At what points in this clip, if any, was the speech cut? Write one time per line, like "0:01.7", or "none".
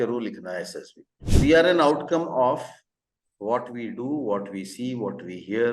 0:01.3